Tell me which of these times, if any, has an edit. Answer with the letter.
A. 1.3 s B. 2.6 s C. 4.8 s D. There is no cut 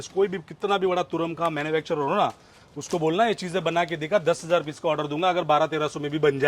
D